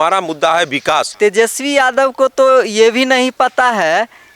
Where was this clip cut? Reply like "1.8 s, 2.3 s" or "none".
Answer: 1.1 s